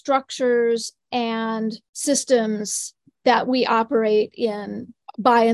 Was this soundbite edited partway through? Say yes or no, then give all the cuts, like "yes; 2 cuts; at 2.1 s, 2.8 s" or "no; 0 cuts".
yes; 1 cut; at 1.9 s